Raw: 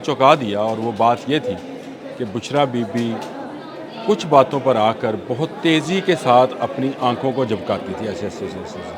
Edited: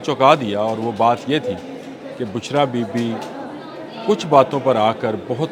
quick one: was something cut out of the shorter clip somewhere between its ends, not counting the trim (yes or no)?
no